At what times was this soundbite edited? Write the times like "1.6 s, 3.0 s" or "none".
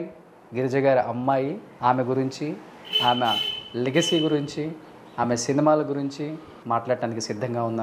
1.7 s, 6.5 s